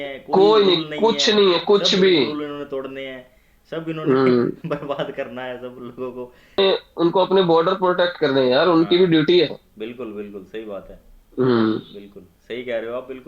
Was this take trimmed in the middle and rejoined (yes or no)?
yes